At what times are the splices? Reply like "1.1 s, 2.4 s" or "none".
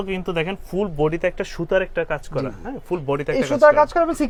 none